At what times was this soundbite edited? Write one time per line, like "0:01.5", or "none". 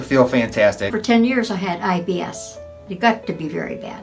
0:00.9
0:02.8